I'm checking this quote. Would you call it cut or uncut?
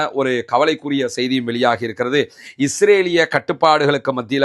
uncut